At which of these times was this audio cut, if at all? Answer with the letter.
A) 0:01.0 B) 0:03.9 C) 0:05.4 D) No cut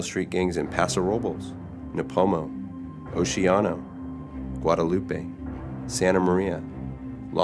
C